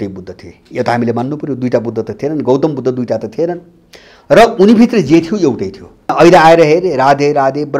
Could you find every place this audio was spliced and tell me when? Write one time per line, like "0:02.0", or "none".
0:06.1

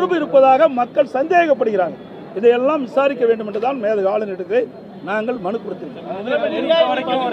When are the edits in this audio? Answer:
none

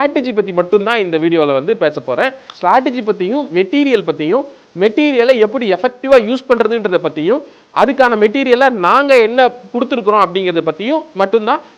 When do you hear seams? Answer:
none

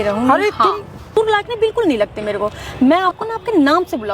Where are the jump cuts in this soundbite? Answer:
0:01.1

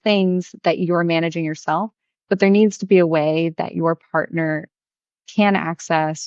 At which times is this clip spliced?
none

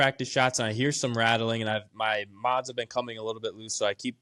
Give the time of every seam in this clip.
none

